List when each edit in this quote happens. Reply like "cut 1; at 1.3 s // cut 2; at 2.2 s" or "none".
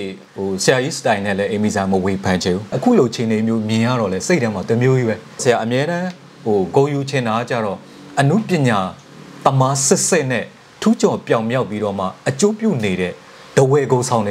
cut 1; at 5.4 s